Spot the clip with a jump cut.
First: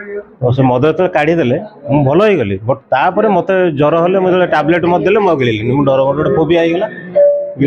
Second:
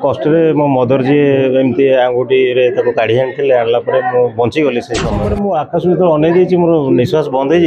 second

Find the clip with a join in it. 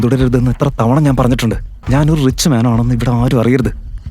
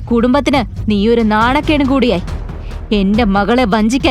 first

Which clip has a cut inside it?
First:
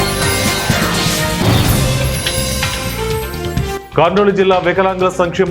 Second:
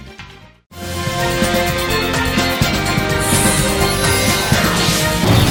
first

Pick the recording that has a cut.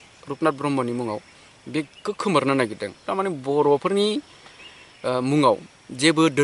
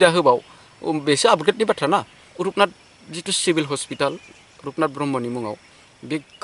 second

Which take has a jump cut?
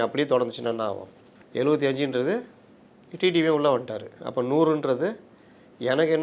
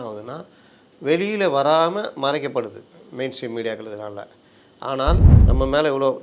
second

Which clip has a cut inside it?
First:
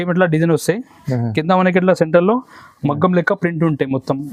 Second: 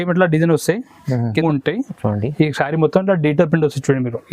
second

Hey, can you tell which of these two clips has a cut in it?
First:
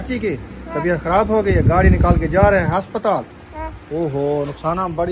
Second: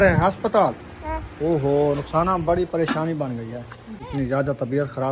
second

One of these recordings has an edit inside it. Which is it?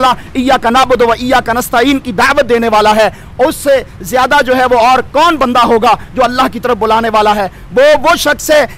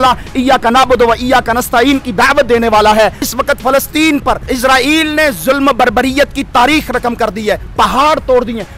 second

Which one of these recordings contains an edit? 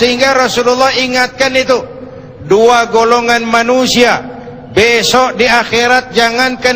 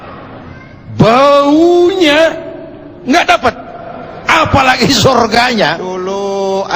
second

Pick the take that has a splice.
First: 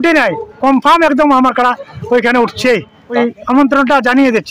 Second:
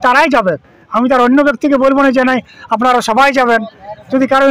first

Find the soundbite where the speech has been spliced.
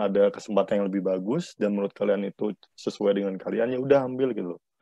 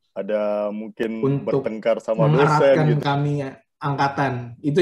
second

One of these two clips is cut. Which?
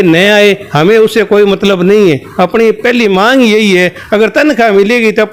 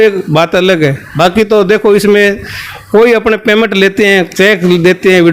second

